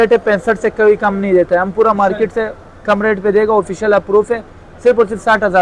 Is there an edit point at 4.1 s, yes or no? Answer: no